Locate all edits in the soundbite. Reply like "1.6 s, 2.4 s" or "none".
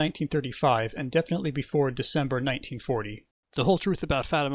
1.0 s